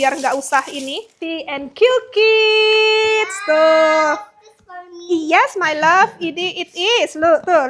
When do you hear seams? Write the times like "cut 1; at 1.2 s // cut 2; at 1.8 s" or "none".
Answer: cut 1; at 1.1 s

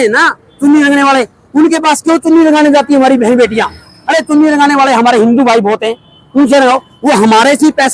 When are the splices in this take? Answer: none

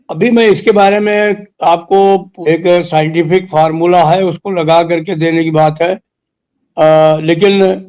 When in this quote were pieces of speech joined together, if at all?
cut 1; at 2.3 s

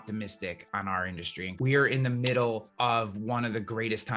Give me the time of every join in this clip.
cut 1; at 1.5 s // cut 2; at 2.7 s

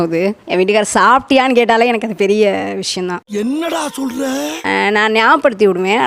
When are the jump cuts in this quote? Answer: none

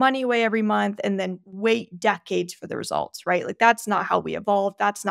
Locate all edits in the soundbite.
none

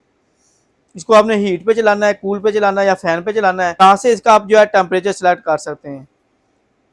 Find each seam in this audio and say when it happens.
cut 1; at 3.8 s

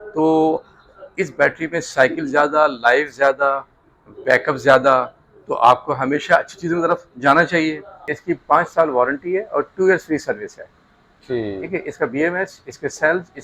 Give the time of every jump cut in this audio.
cut 1; at 8.1 s

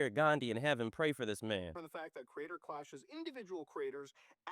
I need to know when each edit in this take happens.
cut 1; at 1.7 s

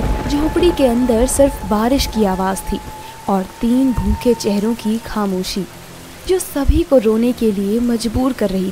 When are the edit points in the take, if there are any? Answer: none

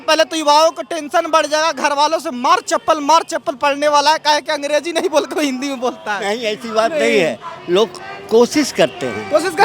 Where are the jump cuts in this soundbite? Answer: none

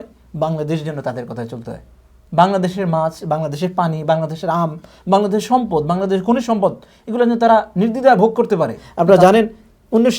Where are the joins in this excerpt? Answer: cut 1; at 8.8 s

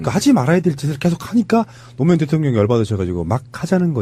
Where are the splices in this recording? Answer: none

